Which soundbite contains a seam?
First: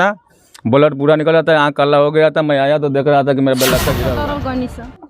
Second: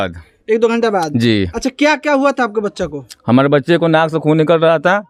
first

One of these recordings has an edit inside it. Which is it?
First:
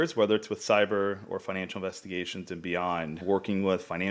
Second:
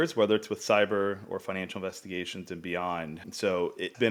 first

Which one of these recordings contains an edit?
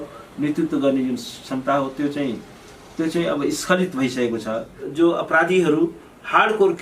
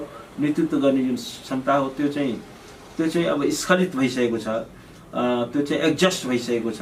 first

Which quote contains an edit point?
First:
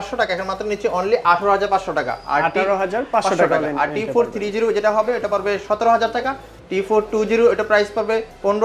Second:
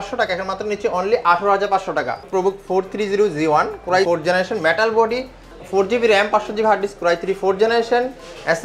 second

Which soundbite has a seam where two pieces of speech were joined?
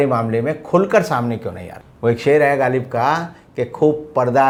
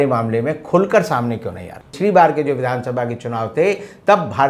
second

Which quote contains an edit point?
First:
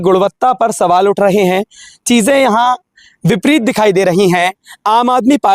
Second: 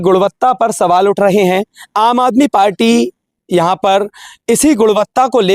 second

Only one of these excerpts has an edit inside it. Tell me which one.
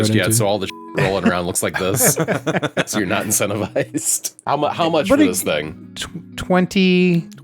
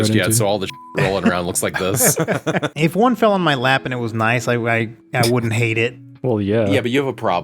second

